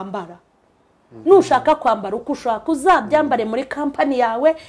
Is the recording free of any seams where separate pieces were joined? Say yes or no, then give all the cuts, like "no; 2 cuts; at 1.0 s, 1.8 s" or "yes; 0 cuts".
no; 1 cut; at 1.1 s